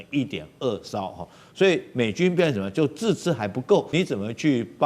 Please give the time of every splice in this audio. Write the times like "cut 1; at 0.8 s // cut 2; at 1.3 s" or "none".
cut 1; at 3.9 s